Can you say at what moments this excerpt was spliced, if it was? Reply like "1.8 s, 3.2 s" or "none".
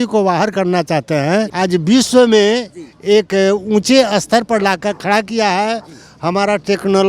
1.5 s